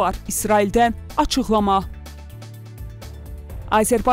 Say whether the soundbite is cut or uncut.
uncut